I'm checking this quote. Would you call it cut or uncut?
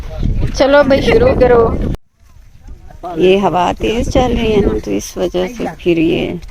cut